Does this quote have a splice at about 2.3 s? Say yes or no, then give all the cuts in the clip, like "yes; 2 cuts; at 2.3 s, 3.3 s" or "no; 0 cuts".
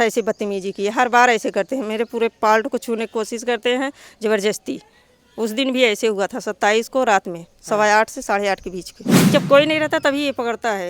no; 1 cut; at 9.3 s